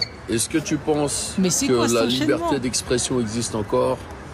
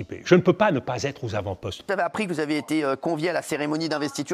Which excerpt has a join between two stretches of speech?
second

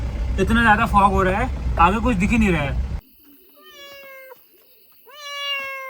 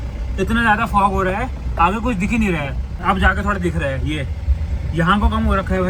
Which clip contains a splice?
first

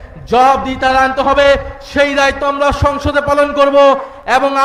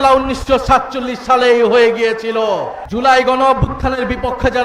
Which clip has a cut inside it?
second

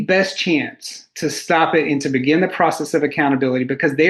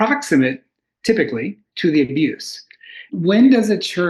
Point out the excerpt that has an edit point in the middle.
second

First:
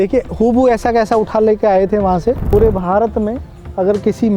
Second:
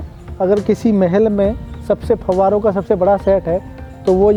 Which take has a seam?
first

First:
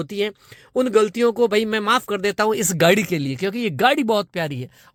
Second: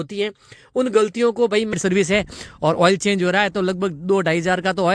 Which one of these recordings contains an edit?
second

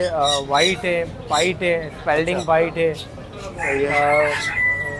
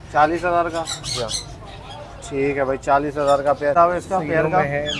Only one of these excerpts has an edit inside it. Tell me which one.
second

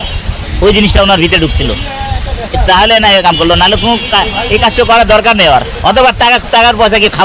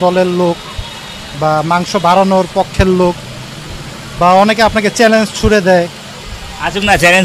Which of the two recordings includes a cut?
second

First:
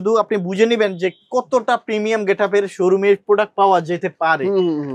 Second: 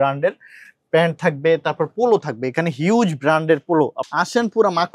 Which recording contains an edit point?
second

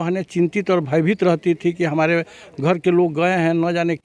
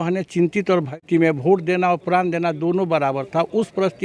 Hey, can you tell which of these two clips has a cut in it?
second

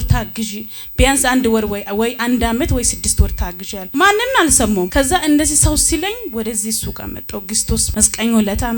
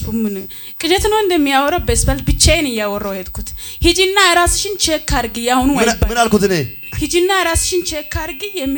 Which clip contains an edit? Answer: first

